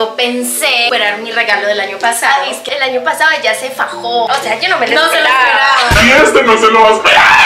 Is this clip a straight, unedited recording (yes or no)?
yes